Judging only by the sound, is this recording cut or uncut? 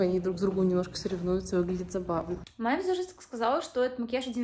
cut